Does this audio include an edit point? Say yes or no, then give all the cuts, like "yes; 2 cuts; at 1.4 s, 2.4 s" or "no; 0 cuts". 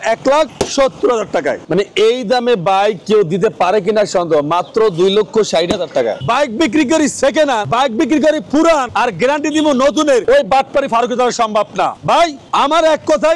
yes; 6 cuts; at 1.6 s, 6.2 s, 7.7 s, 8.9 s, 10.2 s, 12.2 s